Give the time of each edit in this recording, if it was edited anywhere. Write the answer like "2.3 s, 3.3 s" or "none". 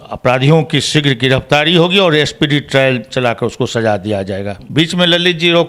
4.6 s